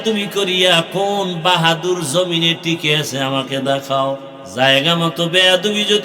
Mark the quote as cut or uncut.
cut